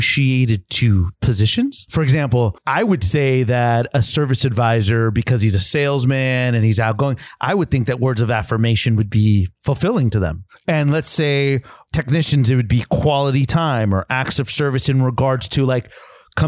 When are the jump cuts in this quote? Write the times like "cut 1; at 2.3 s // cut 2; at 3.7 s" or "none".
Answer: cut 1; at 1.5 s // cut 2; at 2.6 s // cut 3; at 9.5 s // cut 4; at 10.4 s